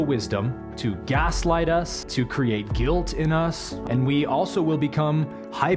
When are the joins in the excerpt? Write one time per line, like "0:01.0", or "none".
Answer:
0:02.0
0:03.7